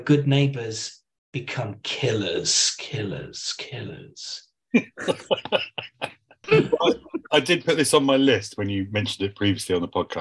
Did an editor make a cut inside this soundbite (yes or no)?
no